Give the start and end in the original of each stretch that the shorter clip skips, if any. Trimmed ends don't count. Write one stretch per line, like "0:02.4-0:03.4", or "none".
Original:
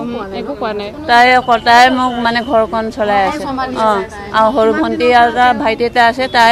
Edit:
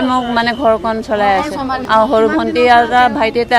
0:03.7-0:04.2